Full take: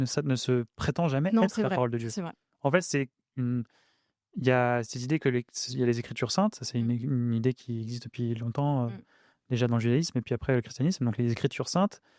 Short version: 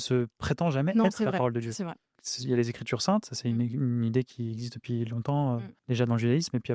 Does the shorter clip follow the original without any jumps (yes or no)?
no